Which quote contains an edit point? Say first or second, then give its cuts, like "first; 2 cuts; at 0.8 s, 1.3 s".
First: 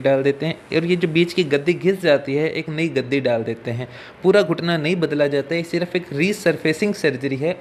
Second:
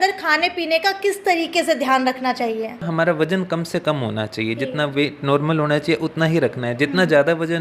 second; 1 cut; at 2.9 s